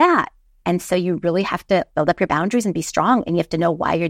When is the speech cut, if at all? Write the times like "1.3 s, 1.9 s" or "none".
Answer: 1.9 s

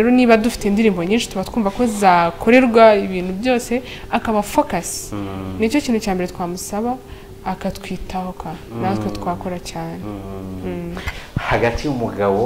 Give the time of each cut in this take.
11.1 s

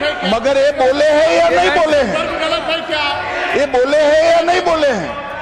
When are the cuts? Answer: none

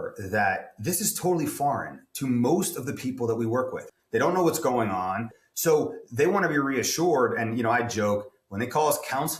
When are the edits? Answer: 3.8 s, 5.3 s

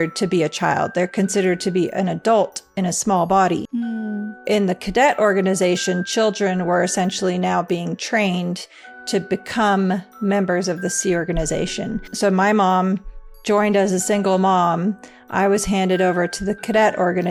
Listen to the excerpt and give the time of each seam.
none

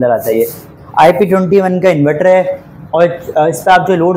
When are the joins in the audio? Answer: none

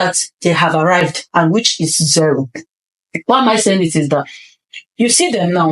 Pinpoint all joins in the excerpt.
none

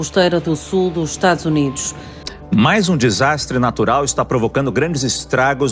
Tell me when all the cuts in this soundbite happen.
none

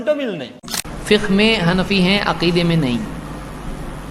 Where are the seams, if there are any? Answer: 0.9 s

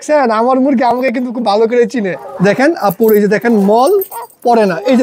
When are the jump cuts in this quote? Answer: 2.2 s

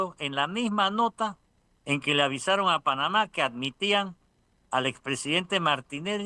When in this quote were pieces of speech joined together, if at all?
none

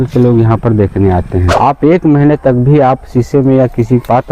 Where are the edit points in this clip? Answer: 1.5 s

